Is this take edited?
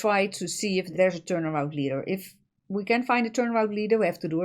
yes; 1 cut; at 0.9 s

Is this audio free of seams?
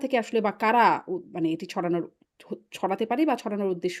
yes; 0 cuts

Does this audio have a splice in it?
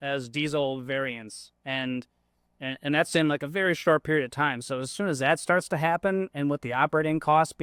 no; 0 cuts

